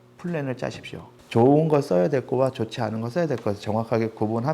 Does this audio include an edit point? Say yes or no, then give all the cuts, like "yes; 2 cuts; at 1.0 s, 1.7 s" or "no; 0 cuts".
yes; 1 cut; at 1.1 s